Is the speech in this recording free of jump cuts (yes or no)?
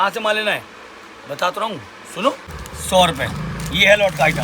no